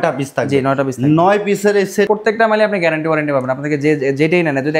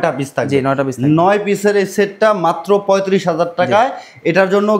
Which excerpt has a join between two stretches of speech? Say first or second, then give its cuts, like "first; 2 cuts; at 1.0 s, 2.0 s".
first; 1 cut; at 2.1 s